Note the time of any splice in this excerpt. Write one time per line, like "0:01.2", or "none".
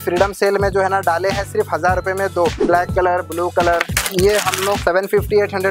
0:02.6
0:04.0
0:04.8